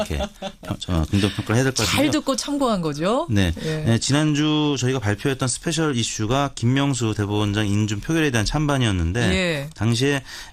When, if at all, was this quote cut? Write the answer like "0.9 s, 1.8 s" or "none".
8.7 s